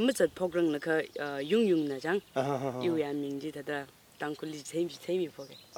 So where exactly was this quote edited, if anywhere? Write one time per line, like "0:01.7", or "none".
none